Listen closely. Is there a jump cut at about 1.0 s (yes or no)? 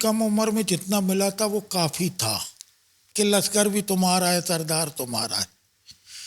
no